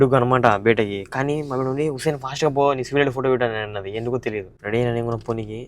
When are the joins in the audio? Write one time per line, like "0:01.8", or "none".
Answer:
0:04.5

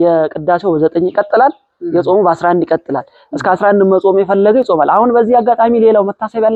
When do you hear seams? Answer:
none

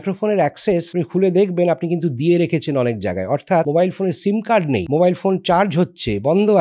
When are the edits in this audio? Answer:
0:00.9
0:03.7
0:04.8

